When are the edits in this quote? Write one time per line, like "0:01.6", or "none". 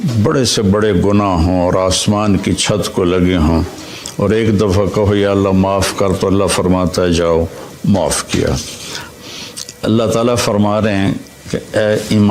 0:09.1